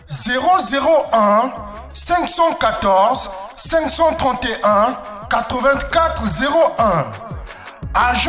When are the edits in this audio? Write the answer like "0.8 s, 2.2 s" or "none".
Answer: none